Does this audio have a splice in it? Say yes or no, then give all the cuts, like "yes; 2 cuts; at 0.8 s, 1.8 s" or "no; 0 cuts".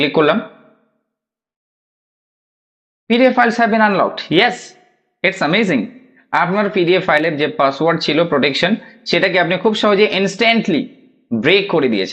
no; 0 cuts